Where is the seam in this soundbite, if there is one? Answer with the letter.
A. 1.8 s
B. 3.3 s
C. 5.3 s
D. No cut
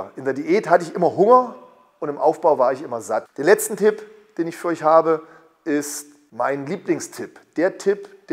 B